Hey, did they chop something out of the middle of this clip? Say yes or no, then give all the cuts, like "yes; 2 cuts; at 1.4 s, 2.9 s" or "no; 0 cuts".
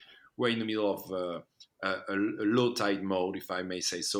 no; 0 cuts